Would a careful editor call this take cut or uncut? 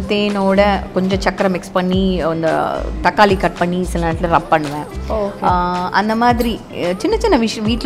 uncut